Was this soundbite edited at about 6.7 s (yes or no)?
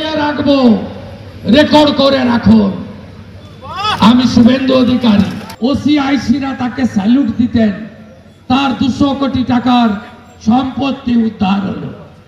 no